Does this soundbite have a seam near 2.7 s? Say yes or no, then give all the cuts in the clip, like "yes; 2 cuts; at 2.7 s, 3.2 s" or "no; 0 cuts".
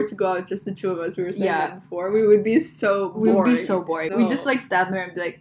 no; 1 cut; at 4.1 s